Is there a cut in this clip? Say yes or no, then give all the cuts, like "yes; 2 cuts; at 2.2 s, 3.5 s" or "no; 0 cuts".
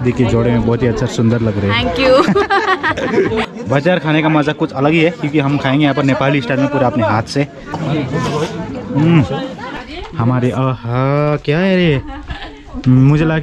yes; 3 cuts; at 3.4 s, 7.8 s, 9.7 s